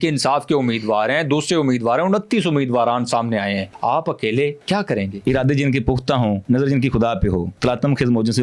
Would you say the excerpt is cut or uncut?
cut